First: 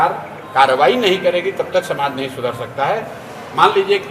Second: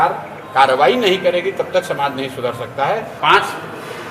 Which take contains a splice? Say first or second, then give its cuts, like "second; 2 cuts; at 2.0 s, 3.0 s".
second; 1 cut; at 3.1 s